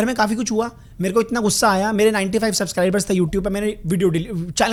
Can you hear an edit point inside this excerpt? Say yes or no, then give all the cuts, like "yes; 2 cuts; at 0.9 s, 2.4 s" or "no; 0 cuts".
no; 0 cuts